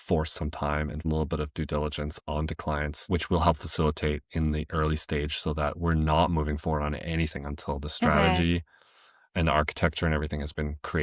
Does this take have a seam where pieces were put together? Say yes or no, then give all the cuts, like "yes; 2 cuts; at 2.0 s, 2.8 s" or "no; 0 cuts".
yes; 2 cuts; at 1.0 s, 3.0 s